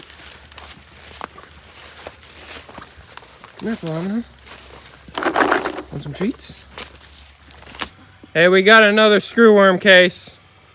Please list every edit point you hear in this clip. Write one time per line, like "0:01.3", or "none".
0:07.9